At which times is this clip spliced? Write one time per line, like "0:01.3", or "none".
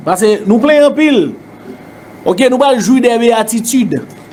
none